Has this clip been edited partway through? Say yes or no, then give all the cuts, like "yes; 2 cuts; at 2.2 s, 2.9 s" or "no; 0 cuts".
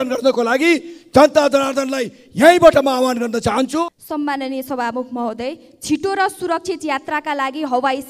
no; 0 cuts